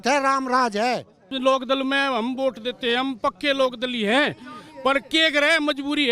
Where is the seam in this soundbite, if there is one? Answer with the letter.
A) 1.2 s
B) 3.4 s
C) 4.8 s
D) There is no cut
A